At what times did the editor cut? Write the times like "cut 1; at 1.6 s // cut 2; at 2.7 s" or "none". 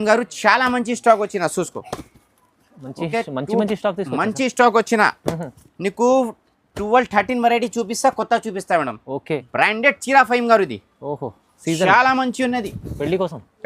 cut 1; at 9.5 s